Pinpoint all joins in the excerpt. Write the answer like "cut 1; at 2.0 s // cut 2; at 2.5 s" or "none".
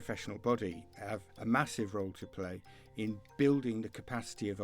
cut 1; at 1.3 s

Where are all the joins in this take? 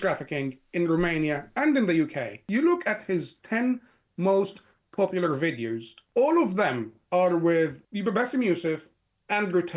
cut 1; at 2.4 s // cut 2; at 5.9 s // cut 3; at 7.8 s

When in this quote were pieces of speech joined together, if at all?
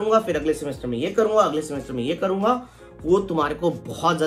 none

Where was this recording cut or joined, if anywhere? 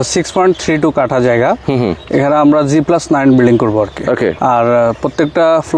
cut 1; at 4.4 s

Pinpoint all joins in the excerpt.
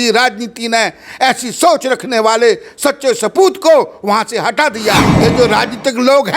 cut 1; at 5.1 s

